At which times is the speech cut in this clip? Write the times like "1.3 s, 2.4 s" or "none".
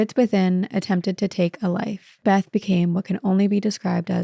2.2 s

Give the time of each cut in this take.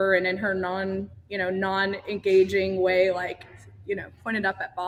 none

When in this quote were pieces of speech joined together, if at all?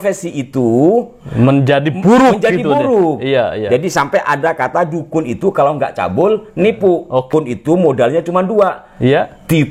7.3 s

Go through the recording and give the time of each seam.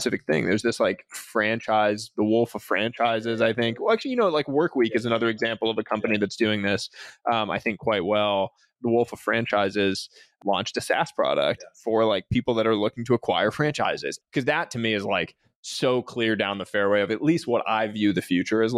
8.7 s, 10.3 s, 14.1 s

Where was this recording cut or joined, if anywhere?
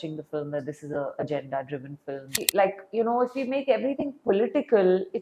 2.4 s

